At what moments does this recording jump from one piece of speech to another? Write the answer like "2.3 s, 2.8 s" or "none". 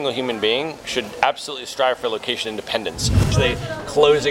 3.3 s